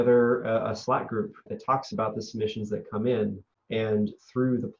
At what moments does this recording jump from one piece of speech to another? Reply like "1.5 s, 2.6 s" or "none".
1.5 s, 3.5 s